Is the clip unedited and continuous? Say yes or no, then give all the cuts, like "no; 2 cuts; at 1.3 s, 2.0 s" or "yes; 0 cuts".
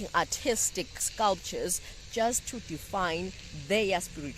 no; 1 cut; at 1.0 s